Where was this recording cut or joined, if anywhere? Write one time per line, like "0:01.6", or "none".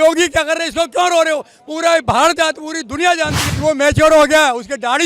0:03.5